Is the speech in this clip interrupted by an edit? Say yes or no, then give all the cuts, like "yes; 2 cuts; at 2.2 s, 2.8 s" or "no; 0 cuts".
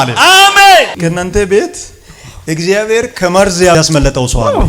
yes; 1 cut; at 0.9 s